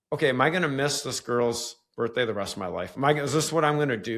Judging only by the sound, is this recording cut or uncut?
uncut